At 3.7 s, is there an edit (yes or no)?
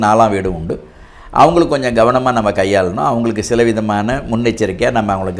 no